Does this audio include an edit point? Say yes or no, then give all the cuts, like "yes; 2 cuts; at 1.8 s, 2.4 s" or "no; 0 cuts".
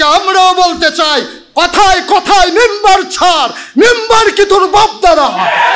no; 0 cuts